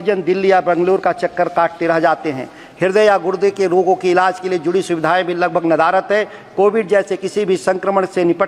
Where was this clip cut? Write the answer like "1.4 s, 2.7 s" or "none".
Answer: none